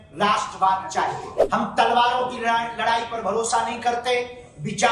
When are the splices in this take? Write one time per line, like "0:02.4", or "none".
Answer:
0:01.3